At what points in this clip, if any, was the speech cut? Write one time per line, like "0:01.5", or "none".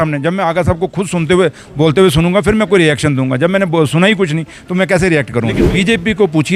0:05.6